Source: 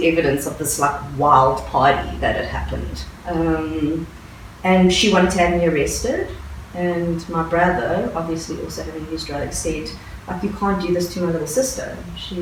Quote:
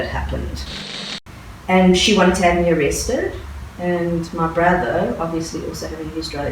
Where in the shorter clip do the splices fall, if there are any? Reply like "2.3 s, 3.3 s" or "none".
1.0 s